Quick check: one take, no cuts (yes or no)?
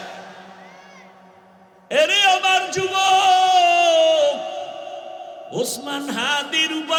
yes